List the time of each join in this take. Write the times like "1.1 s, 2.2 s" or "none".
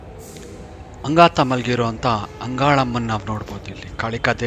1.0 s